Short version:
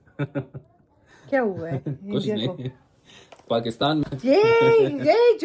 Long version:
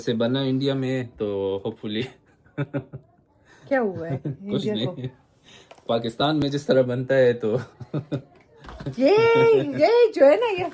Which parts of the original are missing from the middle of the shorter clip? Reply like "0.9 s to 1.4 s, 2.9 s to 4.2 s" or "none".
6.4 s to 8.8 s

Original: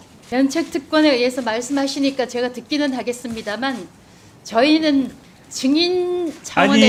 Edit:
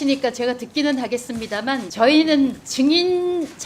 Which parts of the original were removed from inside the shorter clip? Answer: 3.8 s to 4.4 s, 5.2 s to 5.5 s

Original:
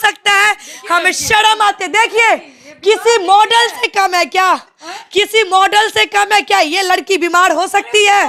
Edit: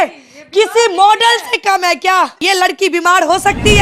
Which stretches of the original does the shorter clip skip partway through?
4.7 s to 6.7 s

